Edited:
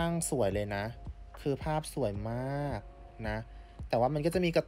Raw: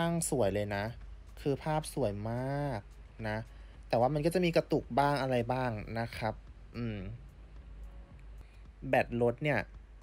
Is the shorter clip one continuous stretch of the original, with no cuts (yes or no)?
yes